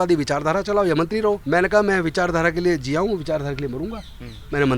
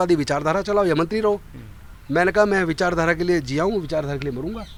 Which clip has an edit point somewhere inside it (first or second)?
first